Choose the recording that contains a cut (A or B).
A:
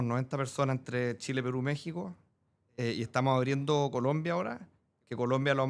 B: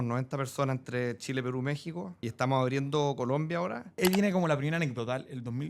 B